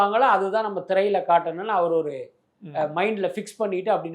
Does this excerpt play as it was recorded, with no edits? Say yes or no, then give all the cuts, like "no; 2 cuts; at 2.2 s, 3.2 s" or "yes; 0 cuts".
yes; 0 cuts